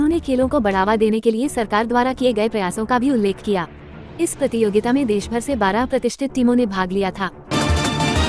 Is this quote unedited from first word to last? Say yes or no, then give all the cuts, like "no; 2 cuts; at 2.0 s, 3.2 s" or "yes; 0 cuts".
no; 1 cut; at 7.4 s